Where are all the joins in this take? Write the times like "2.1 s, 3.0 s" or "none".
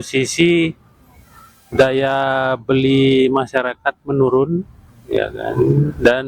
none

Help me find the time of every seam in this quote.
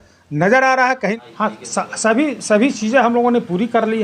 1.1 s

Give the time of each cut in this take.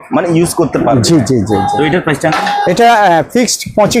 none

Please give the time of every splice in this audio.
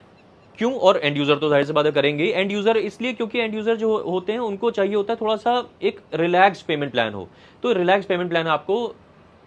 none

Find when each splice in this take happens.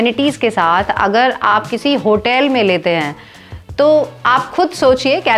none

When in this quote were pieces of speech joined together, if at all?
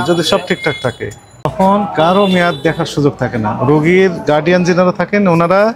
1.5 s

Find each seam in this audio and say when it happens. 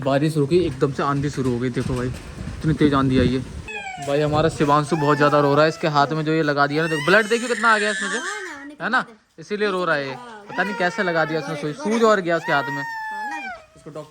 2.5 s, 3.7 s

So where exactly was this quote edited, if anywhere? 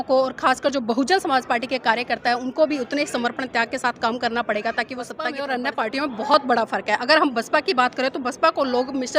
5.4 s

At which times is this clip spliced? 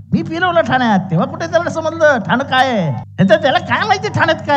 3.0 s

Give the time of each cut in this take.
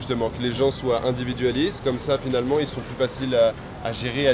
none

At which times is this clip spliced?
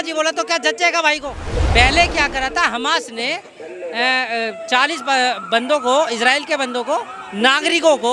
1.5 s

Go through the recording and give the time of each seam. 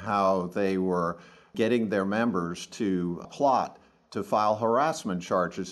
1.5 s, 3.2 s

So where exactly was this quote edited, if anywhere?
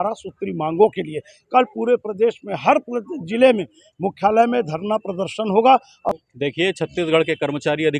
6.1 s

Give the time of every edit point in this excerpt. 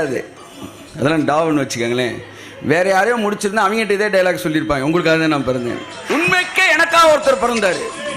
5.9 s

